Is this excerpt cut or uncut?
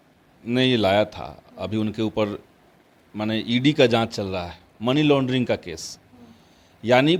uncut